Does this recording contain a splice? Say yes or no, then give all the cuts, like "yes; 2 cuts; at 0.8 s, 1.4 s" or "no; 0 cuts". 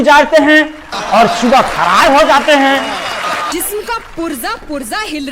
yes; 1 cut; at 3.5 s